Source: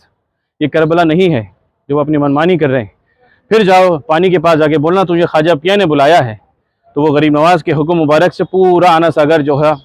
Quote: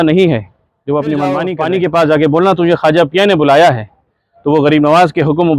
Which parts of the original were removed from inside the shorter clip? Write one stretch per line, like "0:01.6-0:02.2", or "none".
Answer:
0:02.5-0:04.0